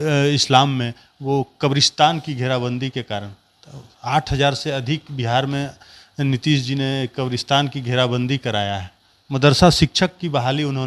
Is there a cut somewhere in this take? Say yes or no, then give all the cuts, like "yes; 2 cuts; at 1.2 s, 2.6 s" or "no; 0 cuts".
no; 0 cuts